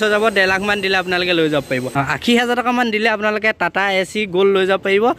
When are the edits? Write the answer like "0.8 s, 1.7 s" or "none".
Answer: 1.9 s

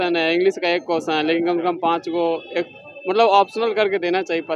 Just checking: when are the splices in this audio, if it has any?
none

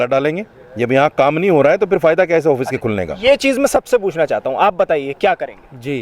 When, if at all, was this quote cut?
none

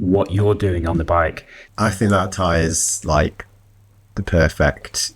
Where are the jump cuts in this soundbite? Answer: 1.6 s

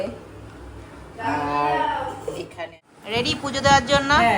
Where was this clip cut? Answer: 2.6 s

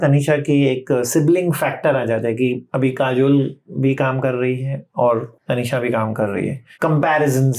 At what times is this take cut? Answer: 2.7 s, 5.3 s, 6.6 s

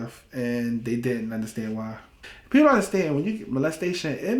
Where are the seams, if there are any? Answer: 2.3 s

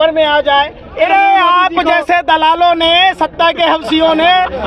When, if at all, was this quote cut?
1.1 s

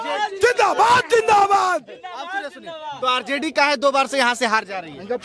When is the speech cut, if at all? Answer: none

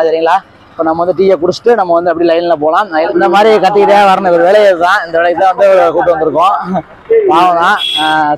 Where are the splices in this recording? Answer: 3.1 s

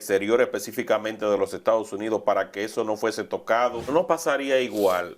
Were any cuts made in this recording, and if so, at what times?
3.9 s

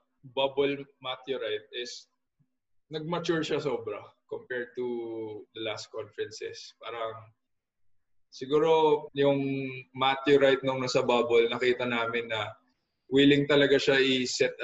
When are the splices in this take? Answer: 9.1 s

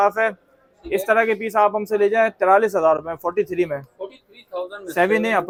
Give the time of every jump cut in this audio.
none

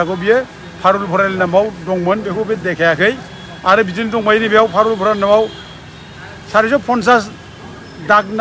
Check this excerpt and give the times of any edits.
none

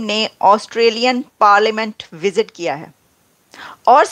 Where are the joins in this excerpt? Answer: none

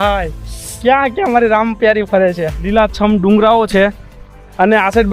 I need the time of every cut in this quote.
2.6 s

